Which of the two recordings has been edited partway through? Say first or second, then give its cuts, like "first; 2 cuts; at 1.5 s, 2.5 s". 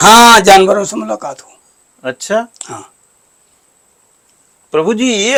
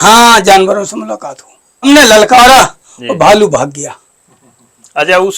second; 1 cut; at 1.9 s